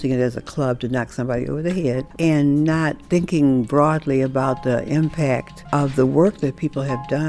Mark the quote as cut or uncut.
cut